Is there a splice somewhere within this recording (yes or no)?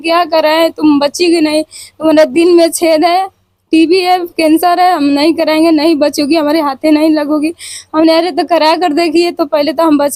no